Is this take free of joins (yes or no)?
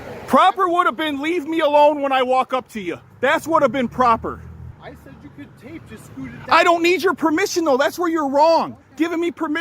no